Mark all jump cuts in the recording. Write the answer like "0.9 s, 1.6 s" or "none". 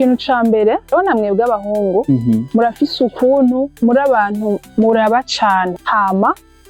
0.9 s, 2.5 s, 3.7 s, 5.8 s